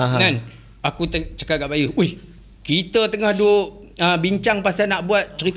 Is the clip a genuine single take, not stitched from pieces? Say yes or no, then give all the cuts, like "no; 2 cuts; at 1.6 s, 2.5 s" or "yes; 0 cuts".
yes; 0 cuts